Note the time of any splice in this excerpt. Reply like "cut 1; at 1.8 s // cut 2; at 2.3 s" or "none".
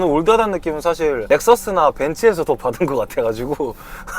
cut 1; at 1.2 s